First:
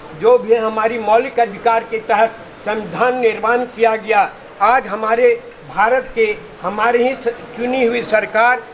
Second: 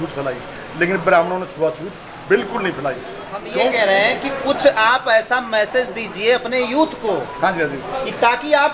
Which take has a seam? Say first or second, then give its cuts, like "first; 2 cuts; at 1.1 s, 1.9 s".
second; 1 cut; at 3.5 s